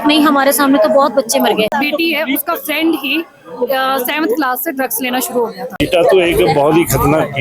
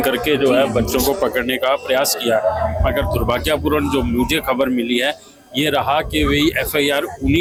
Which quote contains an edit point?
first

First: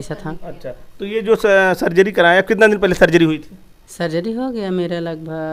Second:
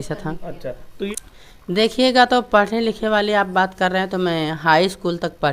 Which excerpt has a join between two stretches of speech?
second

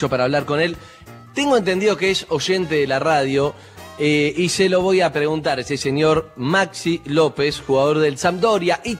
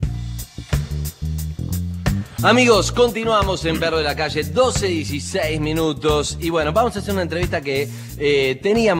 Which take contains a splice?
first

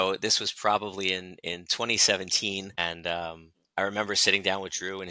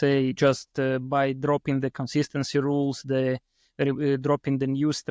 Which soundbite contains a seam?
first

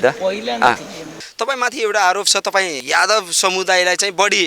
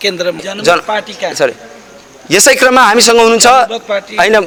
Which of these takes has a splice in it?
first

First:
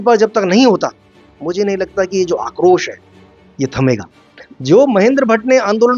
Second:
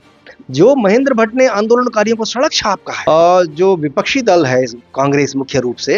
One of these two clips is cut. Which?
second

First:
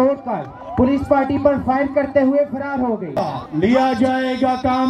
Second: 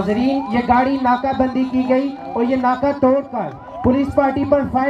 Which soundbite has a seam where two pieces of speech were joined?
first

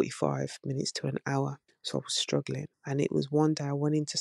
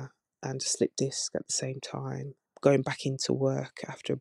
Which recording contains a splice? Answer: first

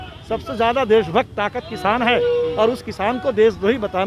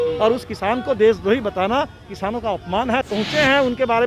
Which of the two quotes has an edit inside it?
second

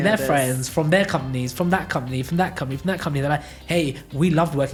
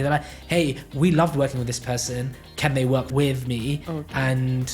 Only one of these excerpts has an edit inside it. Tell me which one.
second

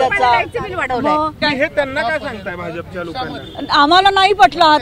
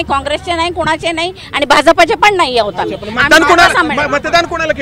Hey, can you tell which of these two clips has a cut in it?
first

